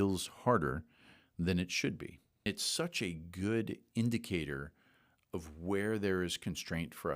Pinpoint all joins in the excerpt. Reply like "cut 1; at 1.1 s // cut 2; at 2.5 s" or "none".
cut 1; at 2.5 s

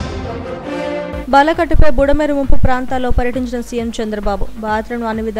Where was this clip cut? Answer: cut 1; at 1.0 s

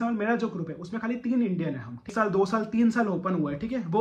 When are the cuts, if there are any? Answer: cut 1; at 2.1 s

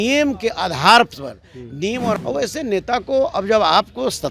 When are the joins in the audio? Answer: cut 1; at 2.2 s

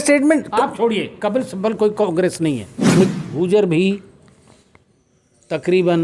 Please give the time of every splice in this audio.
cut 1; at 3.1 s

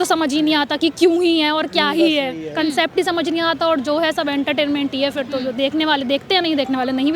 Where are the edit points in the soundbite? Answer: none

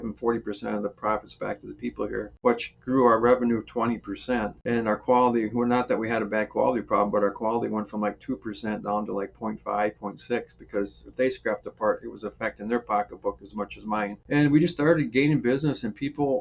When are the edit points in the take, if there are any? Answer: cut 1; at 2.3 s // cut 2; at 4.6 s // cut 3; at 14.2 s

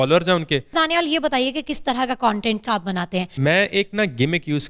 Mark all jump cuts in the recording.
cut 1; at 0.7 s // cut 2; at 3.3 s

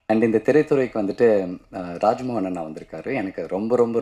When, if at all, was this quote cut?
none

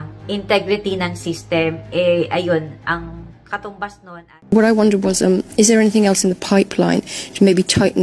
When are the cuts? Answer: cut 1; at 4.4 s

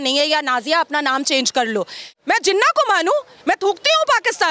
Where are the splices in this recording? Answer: cut 1; at 2.1 s

